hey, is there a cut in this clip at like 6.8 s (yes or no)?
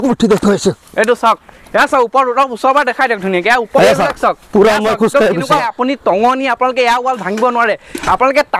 no